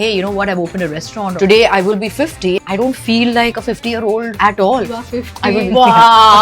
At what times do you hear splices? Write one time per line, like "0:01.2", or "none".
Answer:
0:01.2
0:02.6
0:04.0
0:05.5